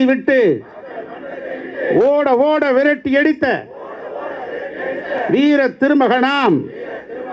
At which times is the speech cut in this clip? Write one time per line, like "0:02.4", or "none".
0:05.2